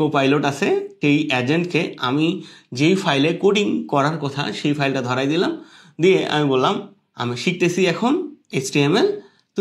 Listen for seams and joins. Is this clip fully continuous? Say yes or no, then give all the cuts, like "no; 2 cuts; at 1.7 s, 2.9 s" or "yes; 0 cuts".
no; 1 cut; at 0.9 s